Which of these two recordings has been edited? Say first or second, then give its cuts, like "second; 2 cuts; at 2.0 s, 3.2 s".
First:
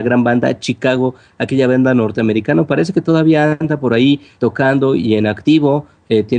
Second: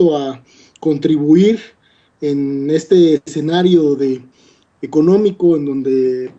first; 1 cut; at 5.2 s